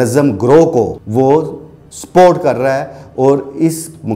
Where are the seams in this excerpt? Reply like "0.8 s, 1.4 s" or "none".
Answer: 1.0 s